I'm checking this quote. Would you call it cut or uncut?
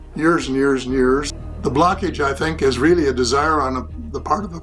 cut